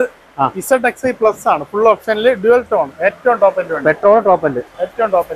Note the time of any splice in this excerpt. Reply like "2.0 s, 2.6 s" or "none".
none

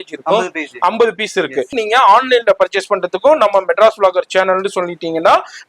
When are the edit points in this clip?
1.7 s

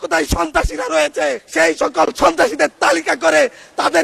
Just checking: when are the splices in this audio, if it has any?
1.4 s

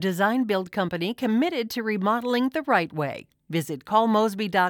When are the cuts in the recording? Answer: none

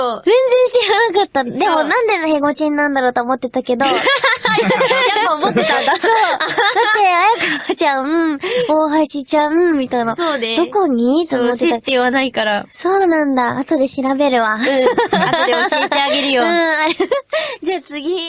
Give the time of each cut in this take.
8.8 s

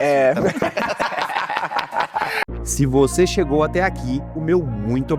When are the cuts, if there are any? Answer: none

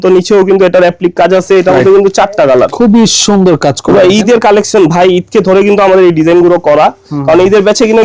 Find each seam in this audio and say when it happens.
2.7 s

